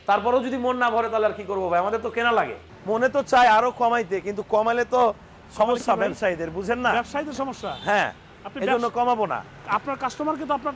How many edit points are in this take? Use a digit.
1